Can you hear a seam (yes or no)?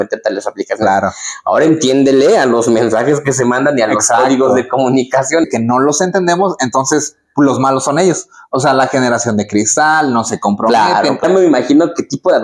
yes